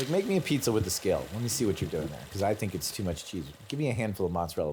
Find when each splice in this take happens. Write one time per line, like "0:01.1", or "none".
none